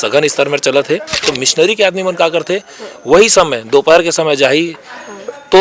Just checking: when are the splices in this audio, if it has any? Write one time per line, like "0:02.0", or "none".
0:01.2